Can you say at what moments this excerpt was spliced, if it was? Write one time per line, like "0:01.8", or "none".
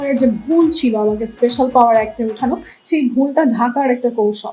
none

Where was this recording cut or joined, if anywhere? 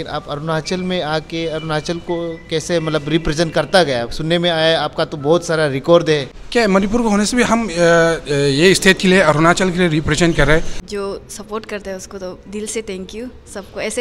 0:06.4
0:10.8

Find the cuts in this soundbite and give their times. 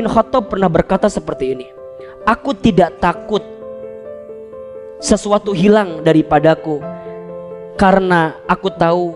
0:03.5
0:04.9

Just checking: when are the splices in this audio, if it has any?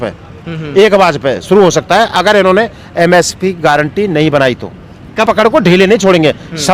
0:05.2

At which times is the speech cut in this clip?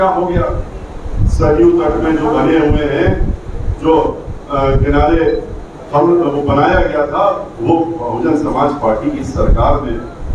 none

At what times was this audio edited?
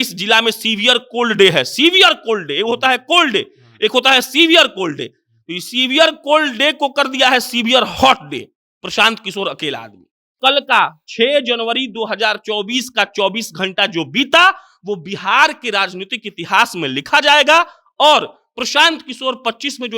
0:10.3

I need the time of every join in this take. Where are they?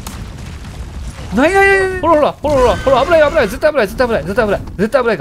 0:01.9

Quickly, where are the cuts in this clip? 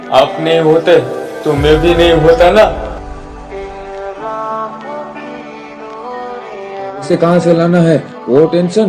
0:07.0

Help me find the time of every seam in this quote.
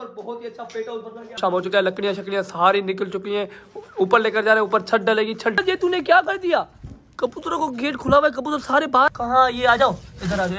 0:01.4
0:05.5
0:09.1

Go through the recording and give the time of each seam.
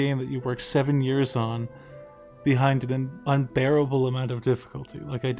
0:03.1

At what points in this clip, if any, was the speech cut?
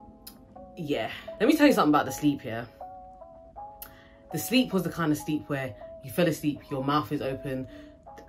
0:01.2

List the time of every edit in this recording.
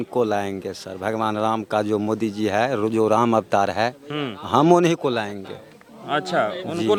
none

